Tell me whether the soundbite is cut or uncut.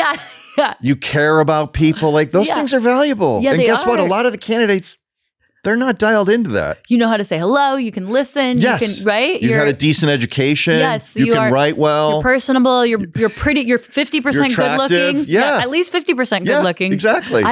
uncut